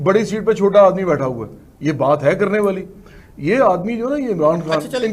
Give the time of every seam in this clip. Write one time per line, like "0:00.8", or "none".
none